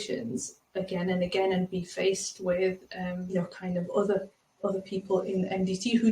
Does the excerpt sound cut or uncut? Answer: cut